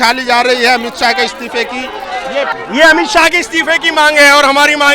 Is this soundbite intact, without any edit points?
no; 1 cut; at 2.5 s

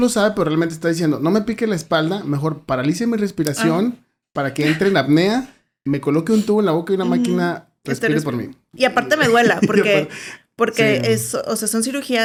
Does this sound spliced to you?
no; 0 cuts

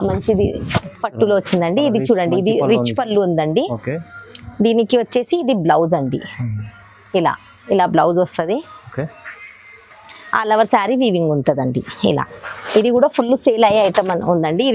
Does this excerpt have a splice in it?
no; 0 cuts

